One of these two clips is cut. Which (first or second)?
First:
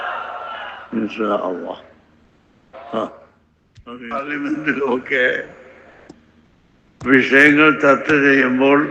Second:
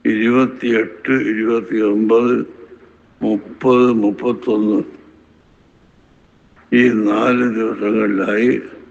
first